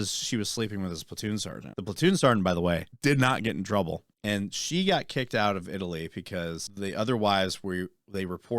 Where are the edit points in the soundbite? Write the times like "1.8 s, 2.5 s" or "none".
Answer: 1.6 s, 2.9 s, 4.1 s, 6.7 s